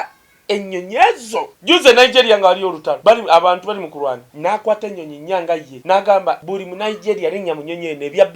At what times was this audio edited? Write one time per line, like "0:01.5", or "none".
0:01.5
0:02.9
0:04.3
0:05.7
0:06.4

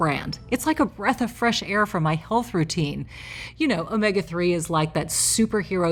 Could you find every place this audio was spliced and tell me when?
none

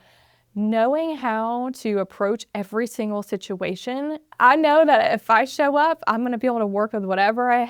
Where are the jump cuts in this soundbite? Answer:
0:04.2

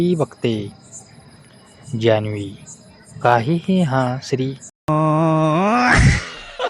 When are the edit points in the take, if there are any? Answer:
0:04.6

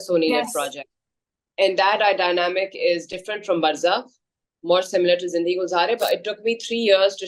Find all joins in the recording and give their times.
0:06.0

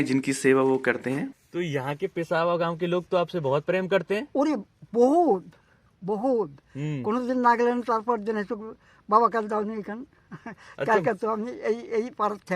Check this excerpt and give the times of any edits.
0:01.4

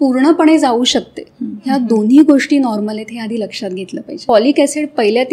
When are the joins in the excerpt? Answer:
0:04.1

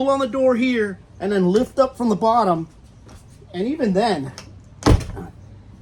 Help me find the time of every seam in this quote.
none

